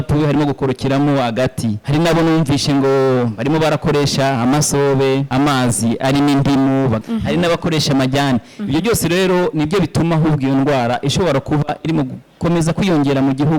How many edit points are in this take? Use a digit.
3